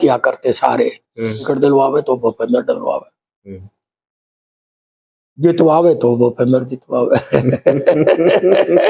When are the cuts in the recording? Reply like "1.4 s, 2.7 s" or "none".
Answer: 1.4 s